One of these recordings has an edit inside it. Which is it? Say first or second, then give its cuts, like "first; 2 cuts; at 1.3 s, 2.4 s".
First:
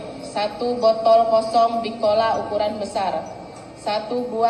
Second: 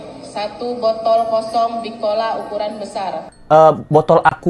second; 1 cut; at 3.4 s